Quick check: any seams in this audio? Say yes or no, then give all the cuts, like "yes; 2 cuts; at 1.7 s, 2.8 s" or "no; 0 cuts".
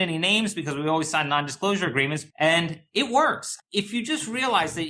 yes; 2 cuts; at 2.2 s, 3.5 s